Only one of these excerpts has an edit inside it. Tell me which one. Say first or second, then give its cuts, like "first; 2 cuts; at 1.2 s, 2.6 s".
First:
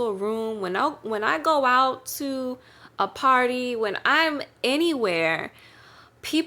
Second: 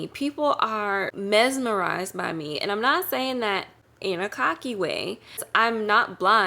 second; 2 cuts; at 1.1 s, 5.5 s